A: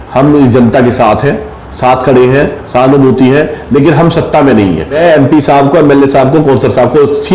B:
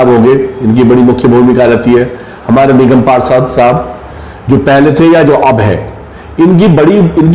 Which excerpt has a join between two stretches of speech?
A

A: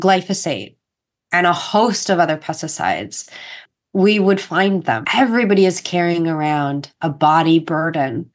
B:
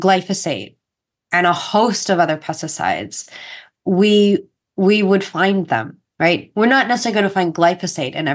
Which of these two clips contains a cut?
A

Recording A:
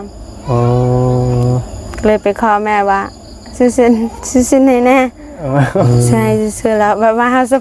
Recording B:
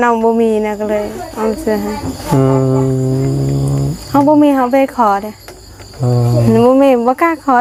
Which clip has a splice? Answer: A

